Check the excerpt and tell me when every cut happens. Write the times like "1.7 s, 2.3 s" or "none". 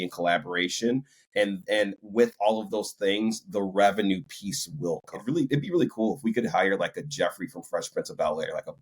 5.1 s

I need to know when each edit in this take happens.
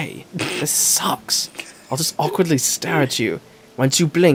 none

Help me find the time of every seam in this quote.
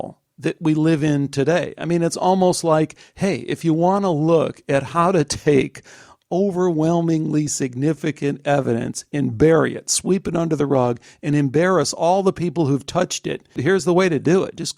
13.6 s

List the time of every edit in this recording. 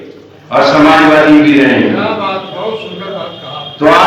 none

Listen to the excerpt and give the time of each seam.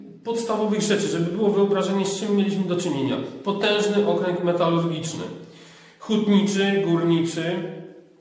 none

